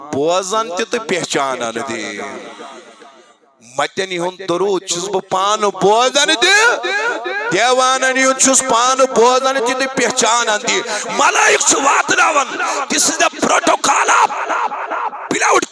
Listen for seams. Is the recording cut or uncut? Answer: uncut